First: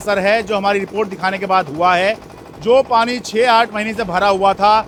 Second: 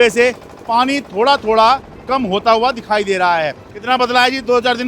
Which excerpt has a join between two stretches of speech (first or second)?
second